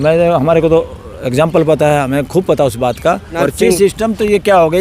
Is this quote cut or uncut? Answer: cut